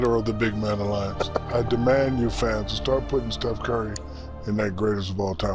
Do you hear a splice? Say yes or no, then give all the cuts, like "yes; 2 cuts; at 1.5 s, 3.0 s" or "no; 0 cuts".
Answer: no; 0 cuts